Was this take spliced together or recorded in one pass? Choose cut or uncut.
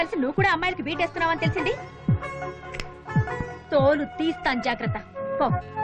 uncut